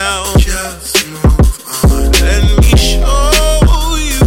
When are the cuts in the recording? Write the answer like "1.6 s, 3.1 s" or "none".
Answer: none